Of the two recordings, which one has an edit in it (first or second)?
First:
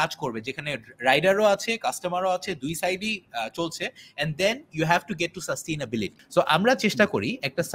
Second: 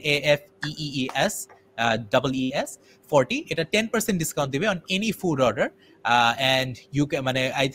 first